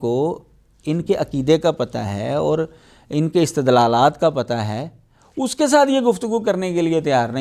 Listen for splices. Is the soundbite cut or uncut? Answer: uncut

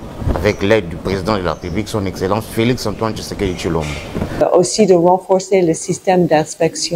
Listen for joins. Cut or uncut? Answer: cut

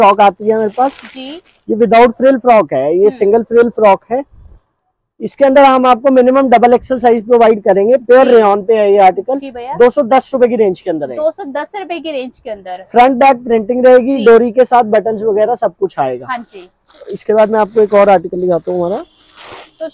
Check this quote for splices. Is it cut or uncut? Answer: uncut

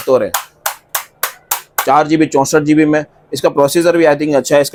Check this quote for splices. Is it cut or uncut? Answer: uncut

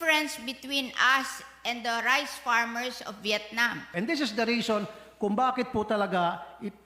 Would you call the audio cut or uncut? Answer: cut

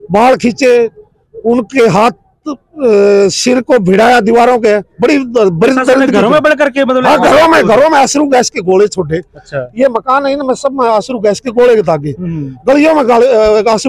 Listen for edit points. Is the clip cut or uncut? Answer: uncut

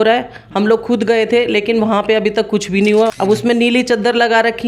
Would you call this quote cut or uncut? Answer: cut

